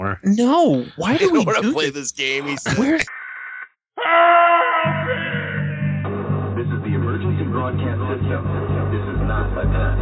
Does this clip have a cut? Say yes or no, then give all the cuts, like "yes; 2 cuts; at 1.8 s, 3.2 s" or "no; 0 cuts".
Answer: yes; 1 cut; at 3.1 s